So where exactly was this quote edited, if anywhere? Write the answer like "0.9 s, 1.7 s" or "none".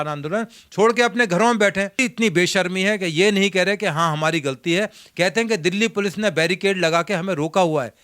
2.0 s